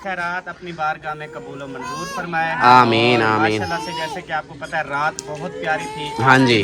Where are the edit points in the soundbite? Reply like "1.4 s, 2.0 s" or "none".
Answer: none